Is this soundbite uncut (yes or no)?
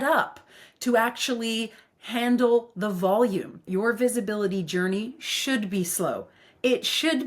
no